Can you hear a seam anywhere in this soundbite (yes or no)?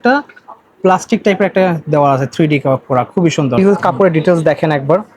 yes